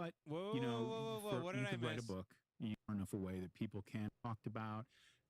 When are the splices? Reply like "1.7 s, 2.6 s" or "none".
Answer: 2.9 s, 4.1 s